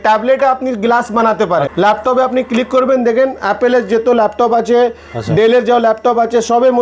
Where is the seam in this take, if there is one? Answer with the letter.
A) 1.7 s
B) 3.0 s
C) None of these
A